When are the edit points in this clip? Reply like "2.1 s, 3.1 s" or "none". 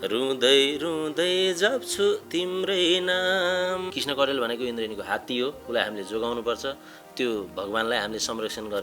4.0 s